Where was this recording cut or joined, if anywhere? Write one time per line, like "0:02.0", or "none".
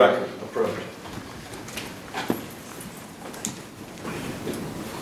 0:04.0